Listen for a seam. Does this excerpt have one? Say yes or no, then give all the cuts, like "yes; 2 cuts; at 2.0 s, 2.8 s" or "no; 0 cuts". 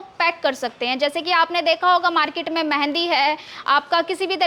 no; 0 cuts